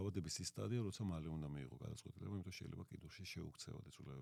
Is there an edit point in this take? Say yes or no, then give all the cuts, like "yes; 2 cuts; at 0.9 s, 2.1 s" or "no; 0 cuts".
no; 0 cuts